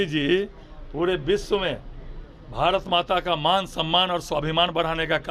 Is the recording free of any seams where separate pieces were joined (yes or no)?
yes